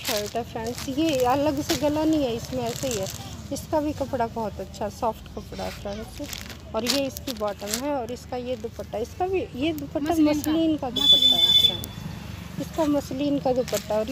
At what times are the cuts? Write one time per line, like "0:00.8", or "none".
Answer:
none